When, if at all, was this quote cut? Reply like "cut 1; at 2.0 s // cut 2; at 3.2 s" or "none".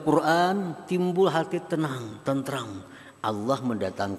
none